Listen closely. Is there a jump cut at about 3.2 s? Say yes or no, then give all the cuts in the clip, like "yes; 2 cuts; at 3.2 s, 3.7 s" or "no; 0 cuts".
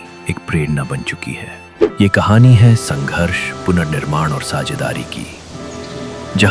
no; 1 cut; at 1.9 s